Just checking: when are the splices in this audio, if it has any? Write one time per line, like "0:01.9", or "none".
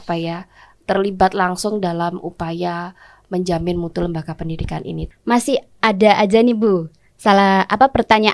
0:05.0